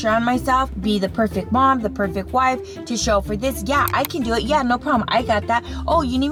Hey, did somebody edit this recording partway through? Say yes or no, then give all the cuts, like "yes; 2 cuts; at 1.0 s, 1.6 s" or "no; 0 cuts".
no; 0 cuts